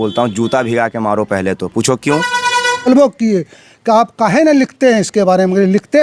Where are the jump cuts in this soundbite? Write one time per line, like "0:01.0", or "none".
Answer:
0:02.9